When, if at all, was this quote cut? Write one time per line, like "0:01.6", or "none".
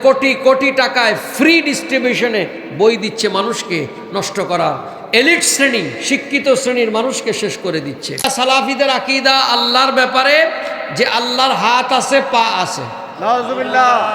0:08.3